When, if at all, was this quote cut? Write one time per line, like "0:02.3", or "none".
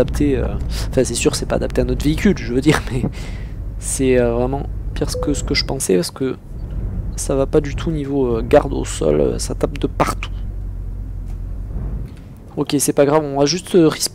none